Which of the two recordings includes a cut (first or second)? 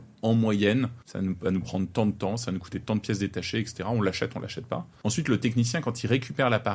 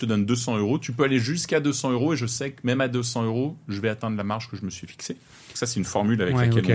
first